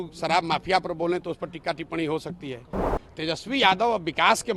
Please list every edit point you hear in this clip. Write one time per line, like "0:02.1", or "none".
0:02.9

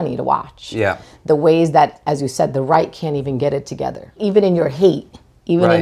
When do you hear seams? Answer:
0:04.2

